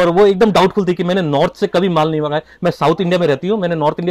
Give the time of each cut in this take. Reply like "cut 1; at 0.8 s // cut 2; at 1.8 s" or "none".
none